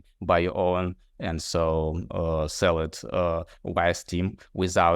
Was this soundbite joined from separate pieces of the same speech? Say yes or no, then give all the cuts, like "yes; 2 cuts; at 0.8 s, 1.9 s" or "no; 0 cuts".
no; 0 cuts